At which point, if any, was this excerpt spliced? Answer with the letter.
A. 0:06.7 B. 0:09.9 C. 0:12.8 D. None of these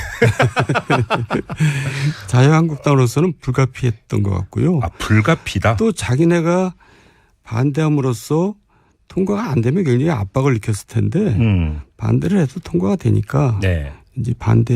B